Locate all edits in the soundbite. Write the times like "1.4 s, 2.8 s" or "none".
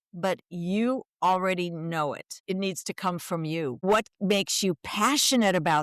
2.3 s, 3.8 s